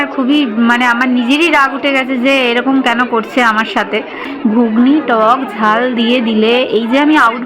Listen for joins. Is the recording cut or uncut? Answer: cut